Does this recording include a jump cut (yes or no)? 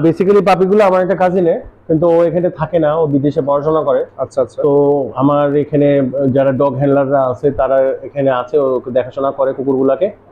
no